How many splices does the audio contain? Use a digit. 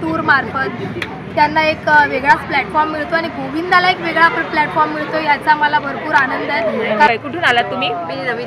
1